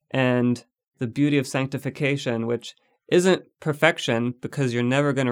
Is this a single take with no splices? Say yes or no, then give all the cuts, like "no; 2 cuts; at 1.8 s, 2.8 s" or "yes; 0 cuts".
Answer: yes; 0 cuts